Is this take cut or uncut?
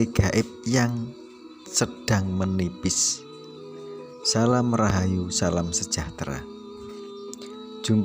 cut